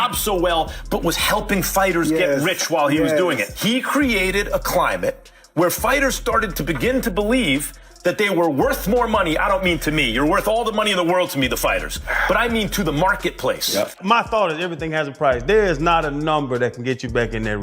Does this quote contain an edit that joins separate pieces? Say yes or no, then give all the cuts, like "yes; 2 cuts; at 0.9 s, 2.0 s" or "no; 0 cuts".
yes; 1 cut; at 14.0 s